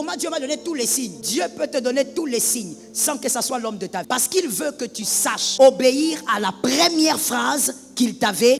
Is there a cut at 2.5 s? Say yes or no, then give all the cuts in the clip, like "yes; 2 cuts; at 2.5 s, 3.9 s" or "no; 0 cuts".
no; 3 cuts; at 1.2 s, 4.1 s, 5.4 s